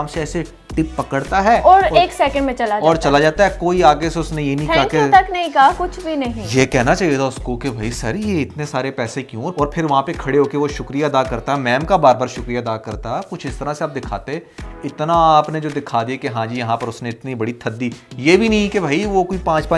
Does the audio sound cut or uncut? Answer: uncut